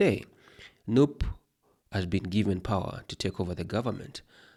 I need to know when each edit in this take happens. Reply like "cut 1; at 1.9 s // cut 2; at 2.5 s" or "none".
none